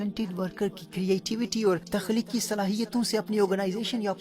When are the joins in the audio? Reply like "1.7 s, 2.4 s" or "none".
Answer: 1.8 s